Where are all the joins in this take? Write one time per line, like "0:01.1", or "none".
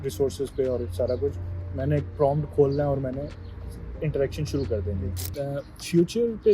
0:05.2